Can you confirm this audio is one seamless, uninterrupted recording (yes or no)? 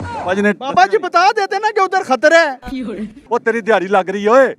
no